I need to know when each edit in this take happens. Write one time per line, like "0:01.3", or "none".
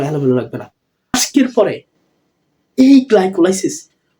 0:01.1